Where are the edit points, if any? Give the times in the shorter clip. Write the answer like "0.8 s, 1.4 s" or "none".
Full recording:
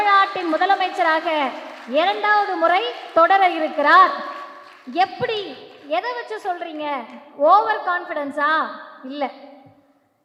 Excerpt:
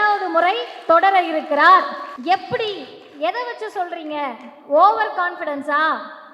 2.1 s